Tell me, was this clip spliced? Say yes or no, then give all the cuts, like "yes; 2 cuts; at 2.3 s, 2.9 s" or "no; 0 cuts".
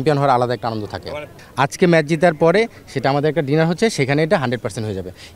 yes; 1 cut; at 1.4 s